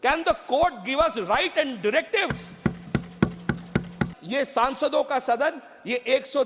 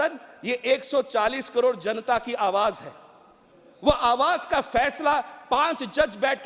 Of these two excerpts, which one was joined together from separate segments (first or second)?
first